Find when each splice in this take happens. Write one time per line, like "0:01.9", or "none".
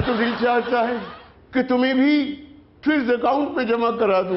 none